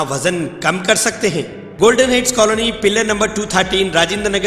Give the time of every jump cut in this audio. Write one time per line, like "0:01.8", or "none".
0:01.6